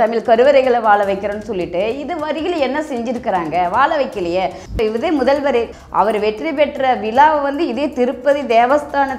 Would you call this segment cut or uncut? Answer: cut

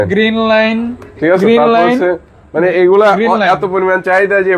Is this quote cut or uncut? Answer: uncut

